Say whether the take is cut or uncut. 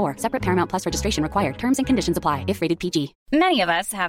cut